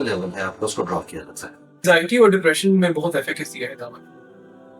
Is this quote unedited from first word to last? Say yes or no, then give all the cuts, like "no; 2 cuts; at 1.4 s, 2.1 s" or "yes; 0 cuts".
no; 1 cut; at 1.8 s